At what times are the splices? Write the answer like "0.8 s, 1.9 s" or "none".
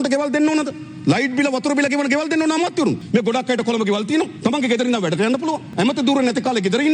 3.0 s, 4.3 s, 5.7 s

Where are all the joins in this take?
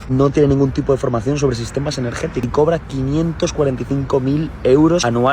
2.4 s

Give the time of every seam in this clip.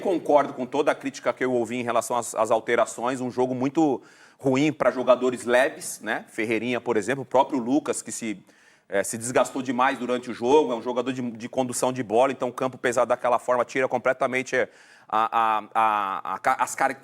none

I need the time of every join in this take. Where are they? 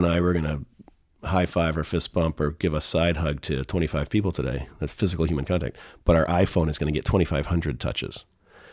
none

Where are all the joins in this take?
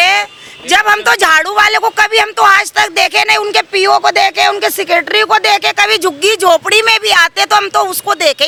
none

